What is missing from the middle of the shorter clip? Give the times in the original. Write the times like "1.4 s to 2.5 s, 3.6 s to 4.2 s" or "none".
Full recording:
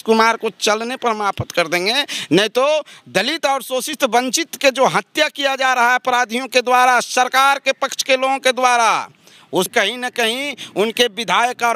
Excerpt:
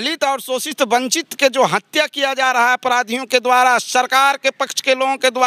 none